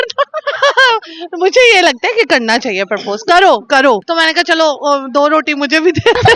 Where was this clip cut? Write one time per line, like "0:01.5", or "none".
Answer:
0:04.1